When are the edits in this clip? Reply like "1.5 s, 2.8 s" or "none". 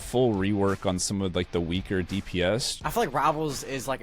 2.7 s